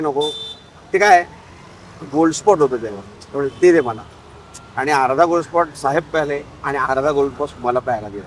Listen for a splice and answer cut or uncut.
uncut